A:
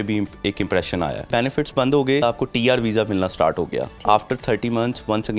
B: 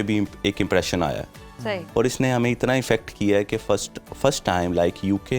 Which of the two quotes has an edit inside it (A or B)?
A